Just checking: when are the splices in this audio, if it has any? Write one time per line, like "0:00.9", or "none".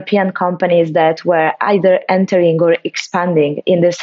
none